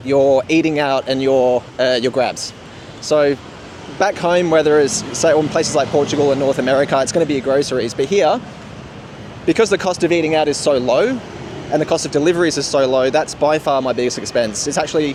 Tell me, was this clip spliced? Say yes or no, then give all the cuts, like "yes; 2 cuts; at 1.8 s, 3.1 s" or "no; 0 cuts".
no; 0 cuts